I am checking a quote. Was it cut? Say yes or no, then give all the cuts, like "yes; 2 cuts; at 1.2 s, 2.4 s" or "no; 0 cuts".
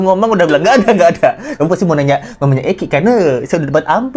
no; 0 cuts